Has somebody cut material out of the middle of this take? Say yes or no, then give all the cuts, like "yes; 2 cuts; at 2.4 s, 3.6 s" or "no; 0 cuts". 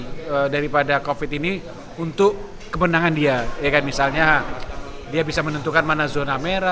no; 0 cuts